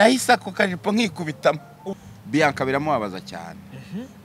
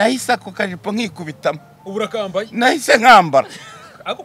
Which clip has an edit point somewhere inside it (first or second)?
first